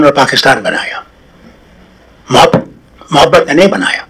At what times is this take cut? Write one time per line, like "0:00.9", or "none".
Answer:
none

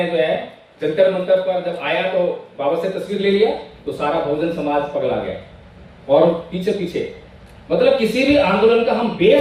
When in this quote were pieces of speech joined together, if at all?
none

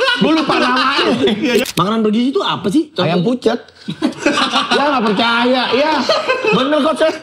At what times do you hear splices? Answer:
0:01.6

